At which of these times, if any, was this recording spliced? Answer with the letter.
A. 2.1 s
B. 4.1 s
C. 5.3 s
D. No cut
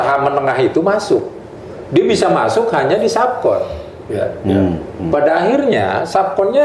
D